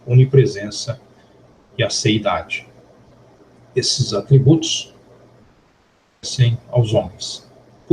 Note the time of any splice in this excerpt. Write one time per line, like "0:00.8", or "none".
0:02.1